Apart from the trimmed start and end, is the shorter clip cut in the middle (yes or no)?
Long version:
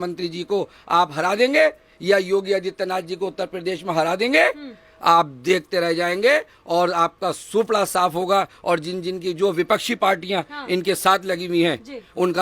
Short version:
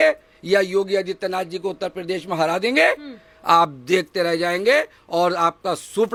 no